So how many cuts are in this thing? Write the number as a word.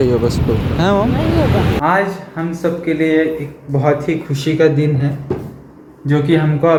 zero